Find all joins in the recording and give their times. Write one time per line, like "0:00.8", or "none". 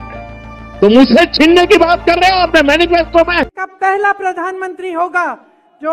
0:03.6